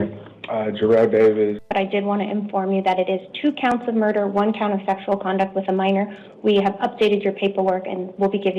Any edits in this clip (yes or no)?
yes